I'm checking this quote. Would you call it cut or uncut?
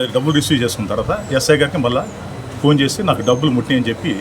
uncut